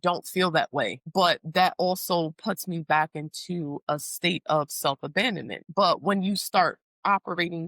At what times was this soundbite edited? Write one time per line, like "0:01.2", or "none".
0:01.0
0:05.6